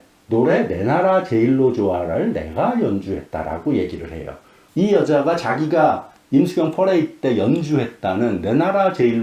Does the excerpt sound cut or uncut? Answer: cut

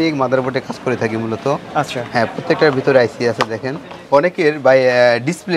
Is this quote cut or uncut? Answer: cut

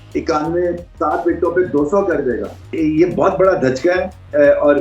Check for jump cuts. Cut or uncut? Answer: cut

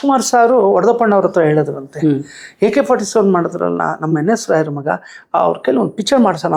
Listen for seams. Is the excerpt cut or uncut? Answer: uncut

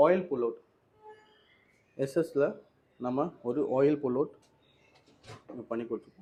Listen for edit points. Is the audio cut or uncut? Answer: uncut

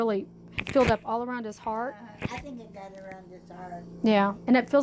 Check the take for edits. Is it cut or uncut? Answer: uncut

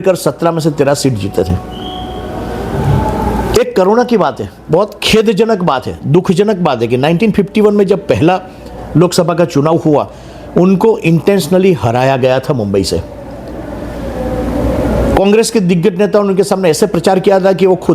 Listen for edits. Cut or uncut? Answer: uncut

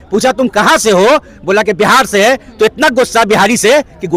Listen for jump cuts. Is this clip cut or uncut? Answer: uncut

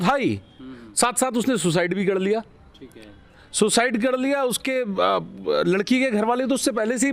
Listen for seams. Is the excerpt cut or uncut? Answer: uncut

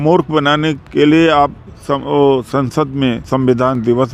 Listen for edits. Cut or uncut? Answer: cut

